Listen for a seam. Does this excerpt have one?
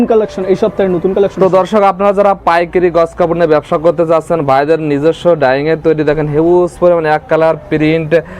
no; 0 cuts

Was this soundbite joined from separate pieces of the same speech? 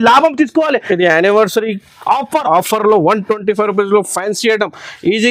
no; 0 cuts

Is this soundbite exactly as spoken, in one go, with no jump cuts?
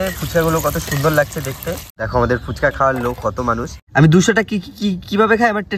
no; 2 cuts; at 1.9 s, 3.7 s

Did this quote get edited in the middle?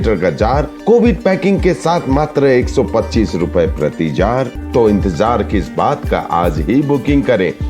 yes; 1 cut; at 4.6 s

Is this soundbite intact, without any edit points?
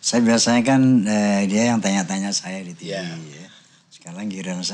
yes; 0 cuts

